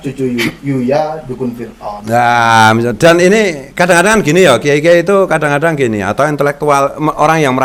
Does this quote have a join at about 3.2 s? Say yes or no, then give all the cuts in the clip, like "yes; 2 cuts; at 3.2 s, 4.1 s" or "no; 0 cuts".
no; 0 cuts